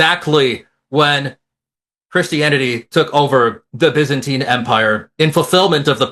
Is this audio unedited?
yes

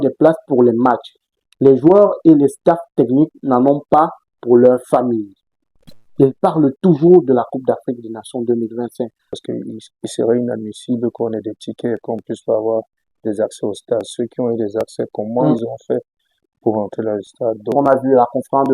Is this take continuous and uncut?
no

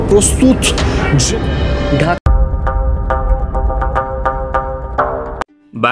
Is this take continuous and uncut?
no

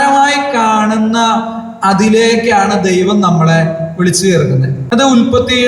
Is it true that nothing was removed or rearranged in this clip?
no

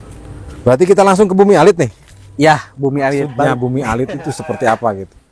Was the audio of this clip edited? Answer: yes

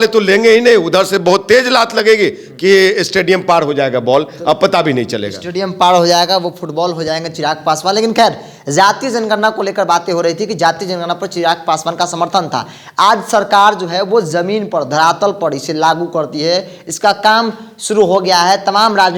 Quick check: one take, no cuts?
yes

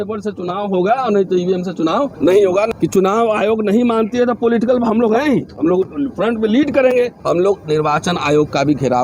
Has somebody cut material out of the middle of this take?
yes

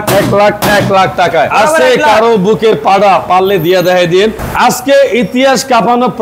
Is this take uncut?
no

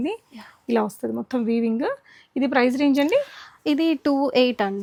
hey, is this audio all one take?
yes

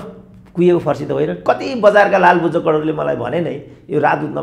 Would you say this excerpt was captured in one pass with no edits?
no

